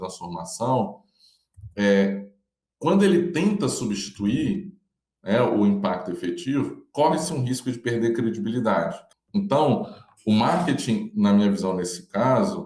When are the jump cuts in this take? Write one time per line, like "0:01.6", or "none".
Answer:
0:09.0